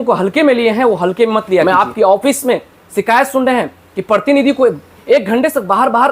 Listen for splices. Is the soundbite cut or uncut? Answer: cut